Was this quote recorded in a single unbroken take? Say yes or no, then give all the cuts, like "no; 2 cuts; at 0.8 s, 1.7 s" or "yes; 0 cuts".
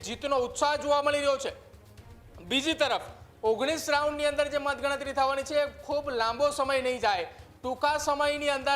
yes; 0 cuts